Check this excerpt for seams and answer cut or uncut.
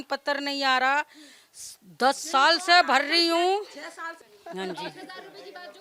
uncut